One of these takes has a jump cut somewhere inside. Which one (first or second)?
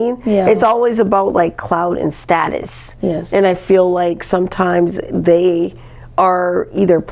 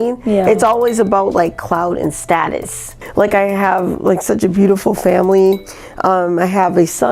second